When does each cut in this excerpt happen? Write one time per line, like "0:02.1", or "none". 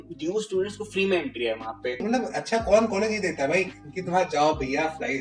0:02.0